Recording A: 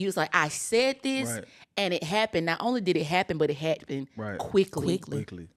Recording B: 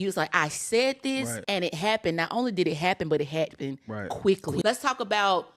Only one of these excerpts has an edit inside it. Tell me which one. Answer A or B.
B